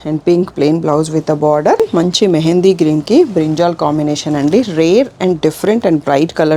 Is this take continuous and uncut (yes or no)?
no